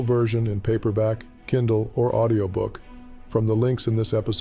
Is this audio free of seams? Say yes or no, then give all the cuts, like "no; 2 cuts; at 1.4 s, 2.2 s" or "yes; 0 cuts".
yes; 0 cuts